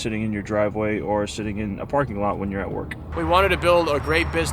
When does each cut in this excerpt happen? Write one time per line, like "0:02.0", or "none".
none

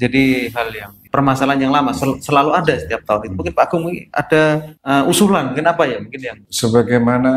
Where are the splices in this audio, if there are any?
0:01.0
0:04.7
0:06.4

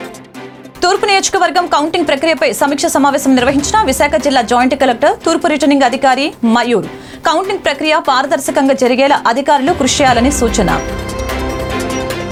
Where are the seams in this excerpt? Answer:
none

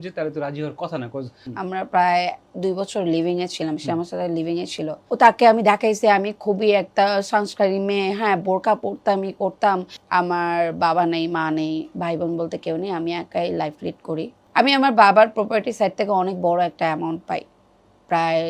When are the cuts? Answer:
0:01.5
0:05.1
0:10.0
0:14.4

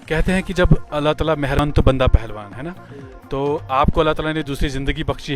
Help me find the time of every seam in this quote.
0:01.6

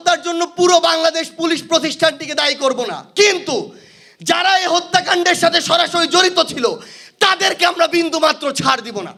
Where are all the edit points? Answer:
none

